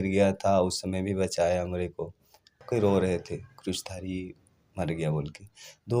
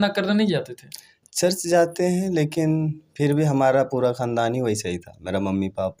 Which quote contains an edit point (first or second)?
first